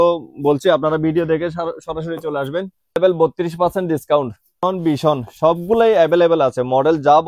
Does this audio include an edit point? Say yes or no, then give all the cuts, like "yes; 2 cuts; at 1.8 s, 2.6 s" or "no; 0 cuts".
yes; 2 cuts; at 3.0 s, 4.6 s